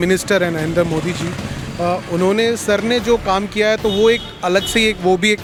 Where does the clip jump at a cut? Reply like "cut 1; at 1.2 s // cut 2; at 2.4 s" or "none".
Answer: none